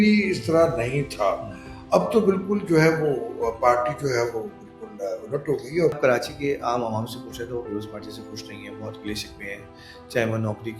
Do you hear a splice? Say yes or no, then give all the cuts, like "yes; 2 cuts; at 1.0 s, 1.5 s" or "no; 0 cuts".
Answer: yes; 1 cut; at 6.0 s